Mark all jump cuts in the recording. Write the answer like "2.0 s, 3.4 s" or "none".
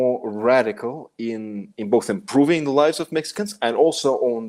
none